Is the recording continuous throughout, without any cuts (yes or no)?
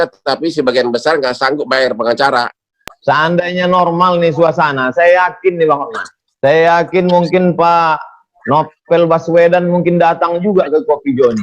no